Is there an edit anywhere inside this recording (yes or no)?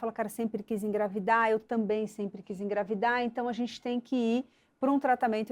no